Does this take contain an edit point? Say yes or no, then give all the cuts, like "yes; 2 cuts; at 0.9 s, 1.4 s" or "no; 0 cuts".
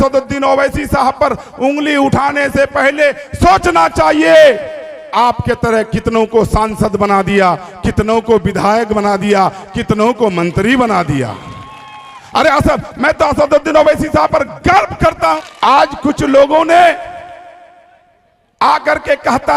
yes; 1 cut; at 15.4 s